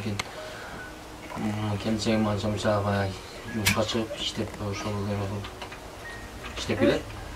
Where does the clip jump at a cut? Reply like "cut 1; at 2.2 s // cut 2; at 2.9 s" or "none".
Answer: none

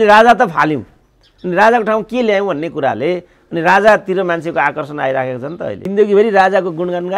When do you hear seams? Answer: cut 1; at 5.9 s

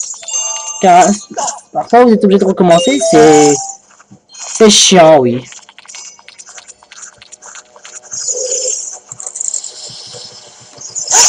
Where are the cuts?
none

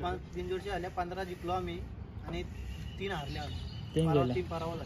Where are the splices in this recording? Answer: none

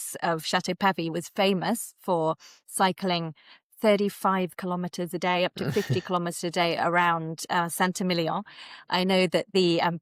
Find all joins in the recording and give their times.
none

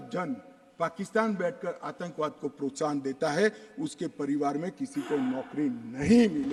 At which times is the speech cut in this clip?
none

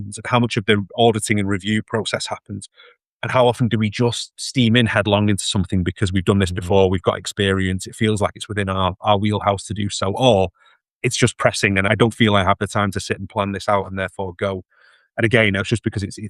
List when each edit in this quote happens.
cut 1; at 11.9 s

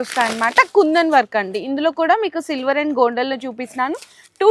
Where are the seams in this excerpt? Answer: none

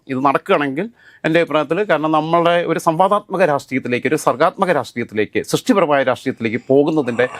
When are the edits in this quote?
none

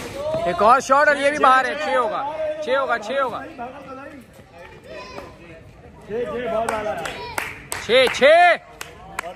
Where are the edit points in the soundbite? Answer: none

